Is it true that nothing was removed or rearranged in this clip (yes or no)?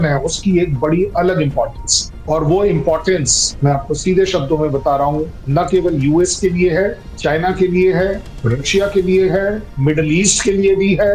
yes